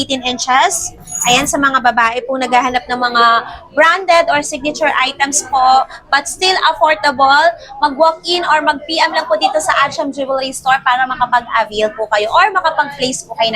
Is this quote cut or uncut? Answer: uncut